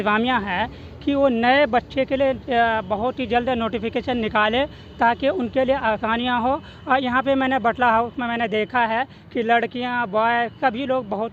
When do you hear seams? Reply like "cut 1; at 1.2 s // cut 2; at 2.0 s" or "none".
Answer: none